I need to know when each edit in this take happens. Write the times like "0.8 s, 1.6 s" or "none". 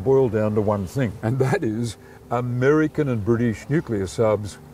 1.2 s